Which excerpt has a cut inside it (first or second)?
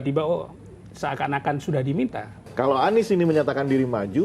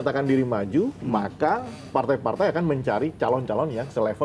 first